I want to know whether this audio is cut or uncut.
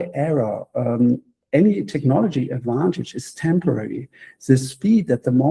cut